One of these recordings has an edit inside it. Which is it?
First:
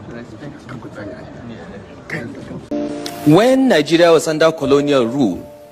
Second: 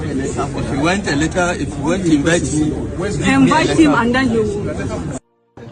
first; 1 cut; at 2.6 s

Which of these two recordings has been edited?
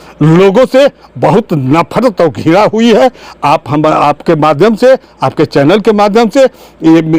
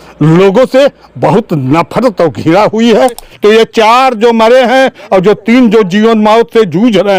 second; 1 cut; at 3.3 s

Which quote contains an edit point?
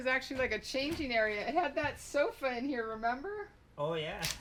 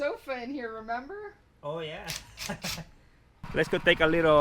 second; 1 cut; at 3.5 s

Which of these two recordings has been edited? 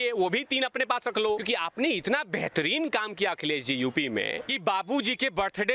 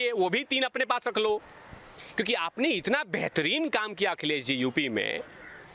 first; 2 cuts; at 1.4 s, 4.5 s

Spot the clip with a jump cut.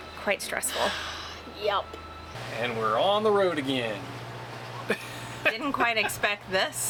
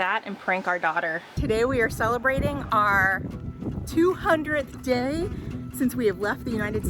second; 1 cut; at 1.4 s

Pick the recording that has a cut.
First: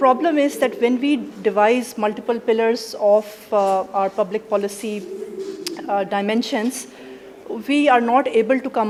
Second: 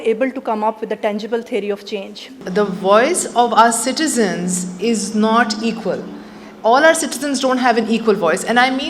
second; 1 cut; at 2.4 s

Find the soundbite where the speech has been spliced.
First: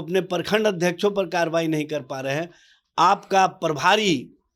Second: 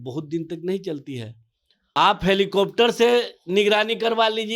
second; 1 cut; at 1.7 s

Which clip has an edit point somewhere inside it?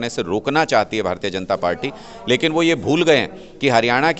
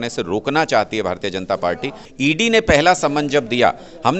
second; 1 cut; at 2.0 s

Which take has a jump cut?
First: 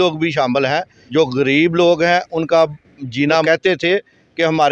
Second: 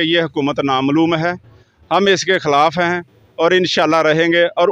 first; 2 cuts; at 1.0 s, 3.4 s

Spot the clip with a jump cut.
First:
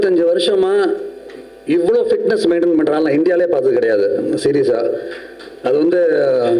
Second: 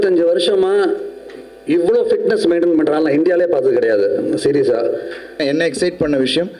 second; 1 cut; at 5.4 s

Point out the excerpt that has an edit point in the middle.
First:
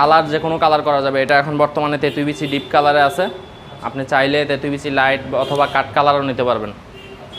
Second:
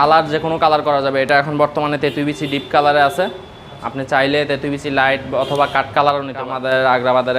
second; 1 cut; at 6.4 s

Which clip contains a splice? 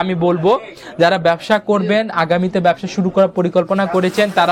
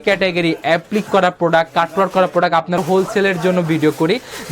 second; 1 cut; at 2.8 s

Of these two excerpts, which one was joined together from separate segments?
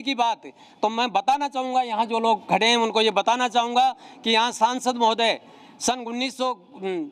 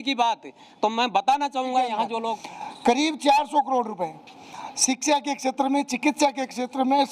second; 1 cut; at 2.3 s

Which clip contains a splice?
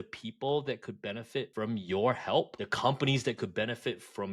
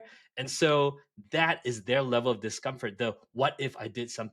first; 2 cuts; at 1.5 s, 2.6 s

